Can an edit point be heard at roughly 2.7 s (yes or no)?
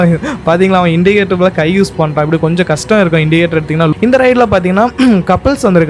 no